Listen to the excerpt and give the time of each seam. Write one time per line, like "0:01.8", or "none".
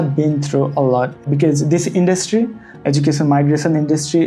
0:01.2